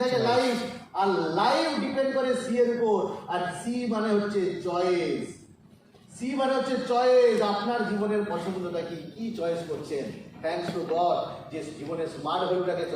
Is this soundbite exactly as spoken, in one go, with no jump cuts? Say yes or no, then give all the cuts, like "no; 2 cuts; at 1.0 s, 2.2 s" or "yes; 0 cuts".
yes; 0 cuts